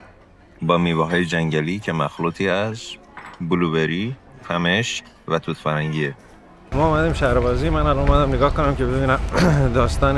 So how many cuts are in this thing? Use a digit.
1